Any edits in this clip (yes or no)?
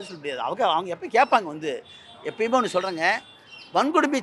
no